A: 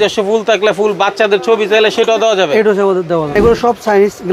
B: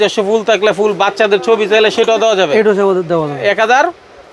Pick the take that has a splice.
A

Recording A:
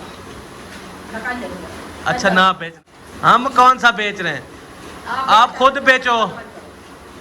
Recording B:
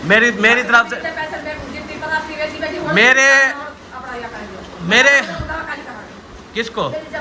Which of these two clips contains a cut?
A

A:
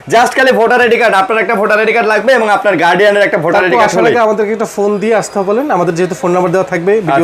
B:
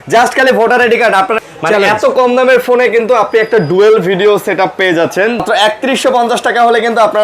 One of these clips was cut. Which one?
B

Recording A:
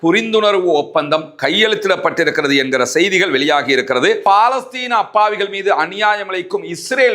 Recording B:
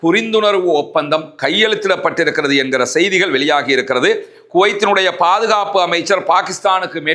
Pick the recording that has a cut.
A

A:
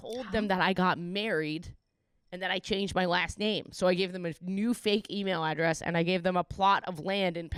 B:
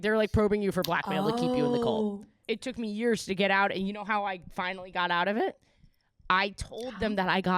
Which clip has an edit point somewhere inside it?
B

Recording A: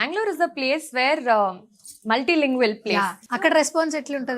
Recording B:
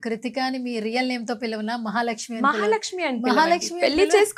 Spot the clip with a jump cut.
A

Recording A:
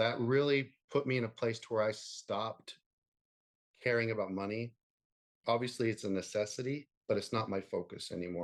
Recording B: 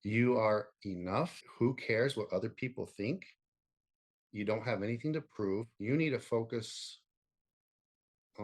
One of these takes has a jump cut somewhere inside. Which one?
B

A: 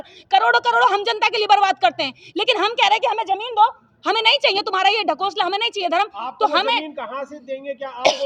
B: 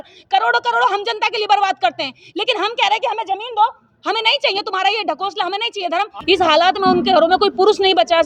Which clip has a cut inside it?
B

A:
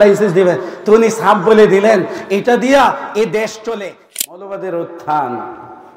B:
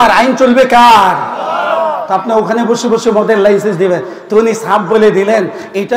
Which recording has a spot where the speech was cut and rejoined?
A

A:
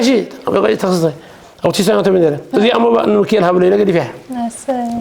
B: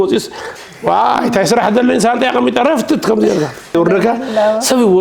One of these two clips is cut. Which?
B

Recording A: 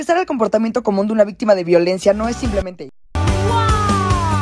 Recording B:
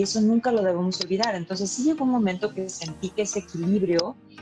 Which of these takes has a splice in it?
A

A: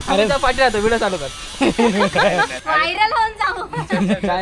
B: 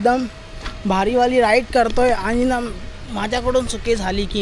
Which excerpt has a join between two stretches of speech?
A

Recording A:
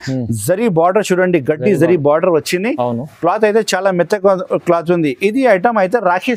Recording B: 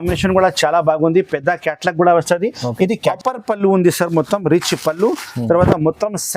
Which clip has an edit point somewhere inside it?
B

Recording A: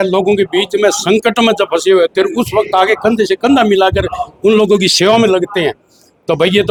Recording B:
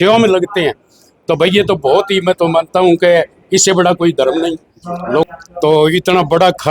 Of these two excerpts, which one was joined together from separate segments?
B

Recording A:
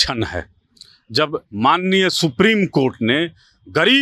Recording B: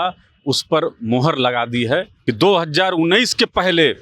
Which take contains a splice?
B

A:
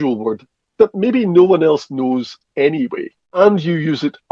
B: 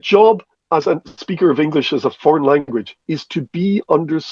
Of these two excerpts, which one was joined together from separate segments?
A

